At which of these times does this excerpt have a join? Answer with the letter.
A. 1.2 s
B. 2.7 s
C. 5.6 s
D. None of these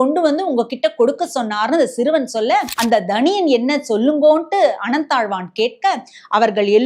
B